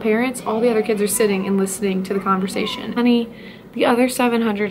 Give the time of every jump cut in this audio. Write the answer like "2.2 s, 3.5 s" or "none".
2.9 s